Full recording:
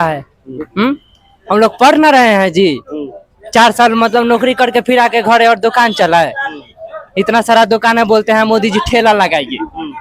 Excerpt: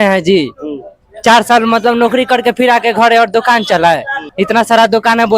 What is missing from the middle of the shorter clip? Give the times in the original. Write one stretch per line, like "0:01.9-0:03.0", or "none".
0:06.5-0:07.0